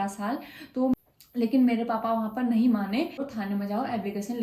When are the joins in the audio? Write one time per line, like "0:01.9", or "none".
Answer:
0:00.9
0:03.3